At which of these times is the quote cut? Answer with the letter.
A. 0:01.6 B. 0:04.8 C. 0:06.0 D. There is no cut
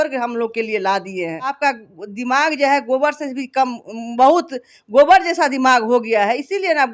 A